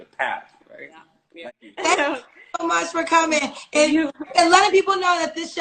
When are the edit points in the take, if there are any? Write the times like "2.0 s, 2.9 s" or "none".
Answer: 1.4 s